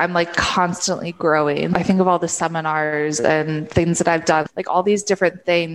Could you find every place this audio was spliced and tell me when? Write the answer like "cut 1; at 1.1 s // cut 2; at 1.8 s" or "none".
cut 1; at 1.7 s // cut 2; at 4.4 s